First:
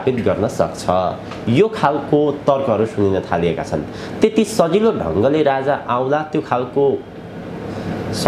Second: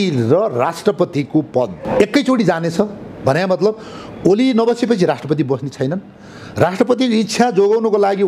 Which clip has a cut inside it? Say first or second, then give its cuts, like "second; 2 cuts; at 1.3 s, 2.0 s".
second; 1 cut; at 1.8 s